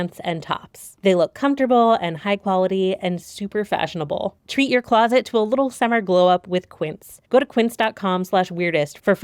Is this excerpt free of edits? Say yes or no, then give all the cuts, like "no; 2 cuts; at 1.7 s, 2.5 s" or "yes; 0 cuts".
yes; 0 cuts